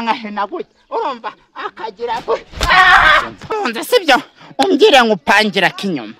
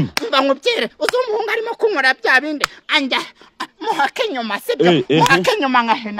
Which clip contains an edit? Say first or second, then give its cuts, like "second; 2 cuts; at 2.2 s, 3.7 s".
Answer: first; 1 cut; at 3.5 s